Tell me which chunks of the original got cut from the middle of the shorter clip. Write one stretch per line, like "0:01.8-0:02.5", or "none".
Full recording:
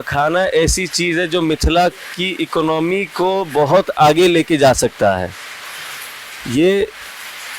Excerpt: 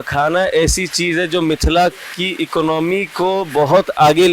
none